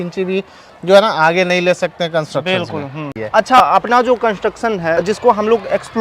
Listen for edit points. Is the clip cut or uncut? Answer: cut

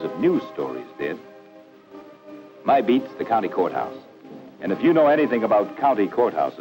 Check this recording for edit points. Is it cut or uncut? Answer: cut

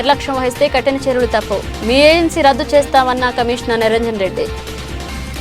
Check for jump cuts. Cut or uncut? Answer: cut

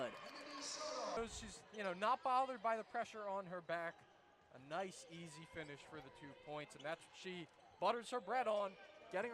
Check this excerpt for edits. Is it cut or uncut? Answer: cut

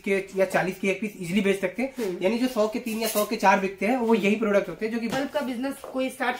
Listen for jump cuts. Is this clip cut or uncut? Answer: cut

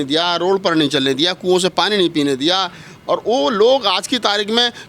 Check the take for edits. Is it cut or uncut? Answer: uncut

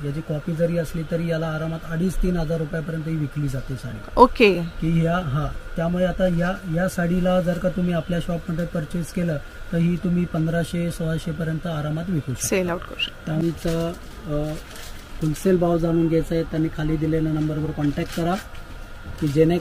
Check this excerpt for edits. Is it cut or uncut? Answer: cut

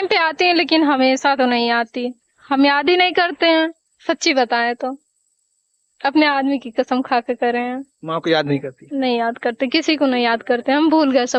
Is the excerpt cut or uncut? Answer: uncut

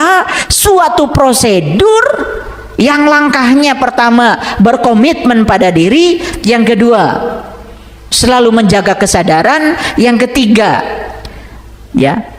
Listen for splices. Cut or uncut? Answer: uncut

